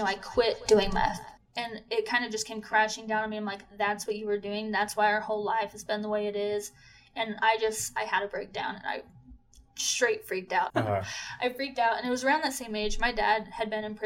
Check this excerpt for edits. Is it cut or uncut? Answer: cut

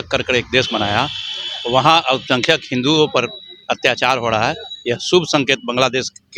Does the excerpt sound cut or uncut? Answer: uncut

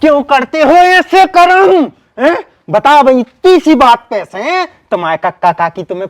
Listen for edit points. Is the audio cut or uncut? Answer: uncut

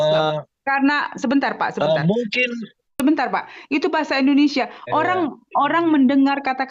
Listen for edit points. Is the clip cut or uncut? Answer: cut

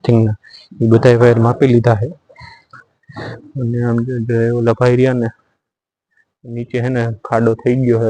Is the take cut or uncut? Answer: uncut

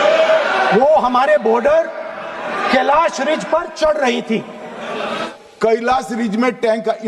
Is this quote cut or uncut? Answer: cut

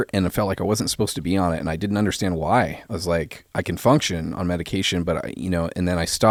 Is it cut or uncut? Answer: uncut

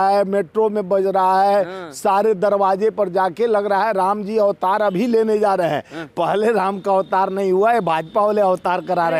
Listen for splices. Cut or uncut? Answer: uncut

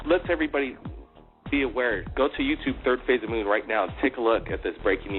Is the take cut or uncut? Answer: uncut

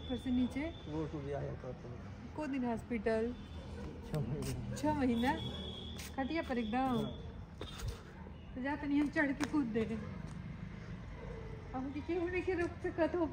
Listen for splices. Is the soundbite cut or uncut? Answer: uncut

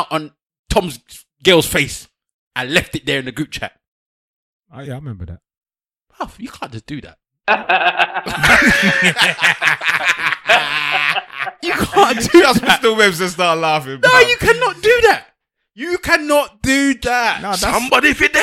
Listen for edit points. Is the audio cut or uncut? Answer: uncut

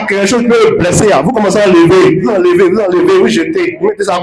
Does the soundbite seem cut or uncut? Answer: uncut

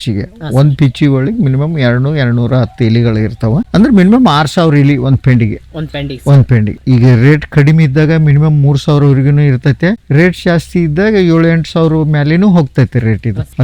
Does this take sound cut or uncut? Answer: uncut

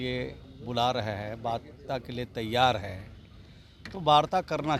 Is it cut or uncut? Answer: uncut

